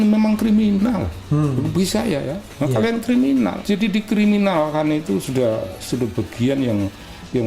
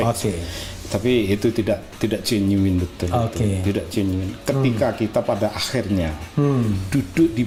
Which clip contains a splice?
first; 1 cut; at 3.6 s

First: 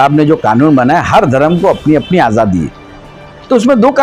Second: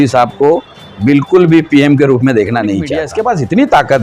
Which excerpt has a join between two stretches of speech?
second; 1 cut; at 3.1 s

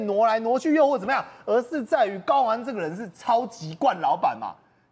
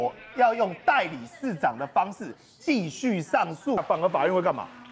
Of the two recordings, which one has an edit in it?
second; 1 cut; at 3.8 s

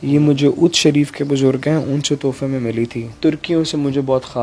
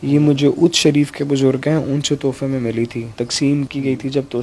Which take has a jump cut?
first; 1 cut; at 3.1 s

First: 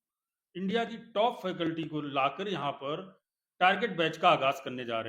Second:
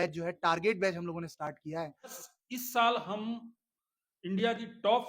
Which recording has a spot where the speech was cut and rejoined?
second; 1 cut; at 2.1 s

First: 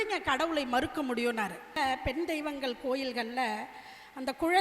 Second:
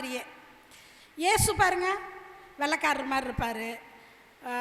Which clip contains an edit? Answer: first; 1 cut; at 1.7 s

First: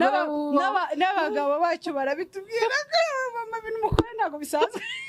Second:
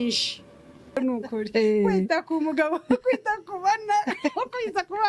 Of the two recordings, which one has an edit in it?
second; 1 cut; at 1.0 s

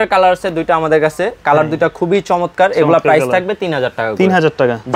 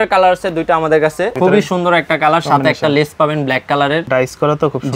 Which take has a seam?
second; 2 cuts; at 1.3 s, 4.1 s

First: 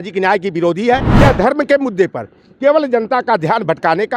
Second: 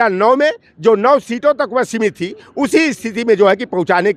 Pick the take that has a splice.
first; 1 cut; at 1.1 s

